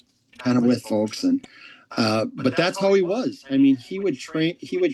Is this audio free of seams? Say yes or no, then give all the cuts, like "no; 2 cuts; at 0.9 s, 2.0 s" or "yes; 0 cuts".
yes; 0 cuts